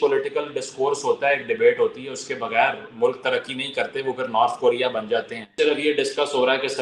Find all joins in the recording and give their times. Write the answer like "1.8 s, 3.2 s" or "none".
5.5 s